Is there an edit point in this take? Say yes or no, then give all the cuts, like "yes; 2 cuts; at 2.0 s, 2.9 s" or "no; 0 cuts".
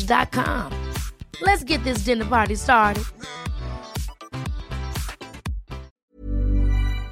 yes; 1 cut; at 6.0 s